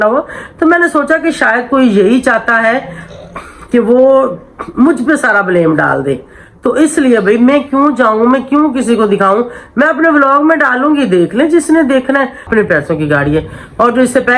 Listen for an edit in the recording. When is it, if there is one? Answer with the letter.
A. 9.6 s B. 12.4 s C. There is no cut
B